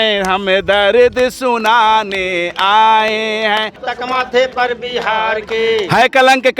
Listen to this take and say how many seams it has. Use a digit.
1